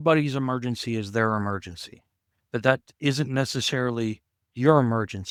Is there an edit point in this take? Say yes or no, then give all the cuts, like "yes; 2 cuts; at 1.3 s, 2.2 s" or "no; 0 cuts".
no; 0 cuts